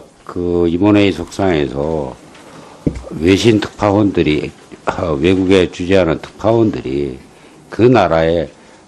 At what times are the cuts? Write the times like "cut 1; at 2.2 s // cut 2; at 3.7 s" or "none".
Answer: cut 1; at 5.0 s